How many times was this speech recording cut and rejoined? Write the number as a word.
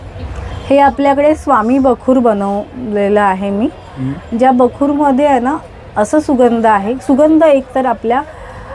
zero